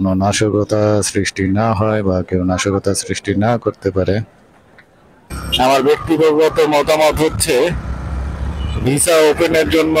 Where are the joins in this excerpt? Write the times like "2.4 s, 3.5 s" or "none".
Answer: 5.4 s